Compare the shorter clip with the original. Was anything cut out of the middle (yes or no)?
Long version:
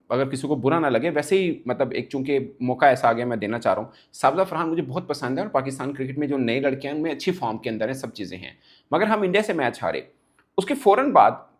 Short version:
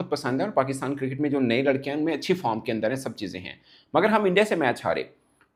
no